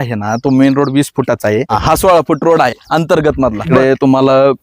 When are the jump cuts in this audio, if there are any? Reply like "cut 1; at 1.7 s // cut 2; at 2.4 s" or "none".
cut 1; at 1.7 s // cut 2; at 3.6 s